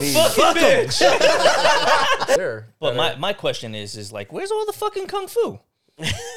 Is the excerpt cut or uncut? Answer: cut